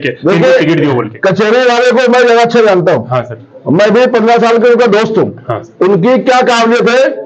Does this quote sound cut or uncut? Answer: uncut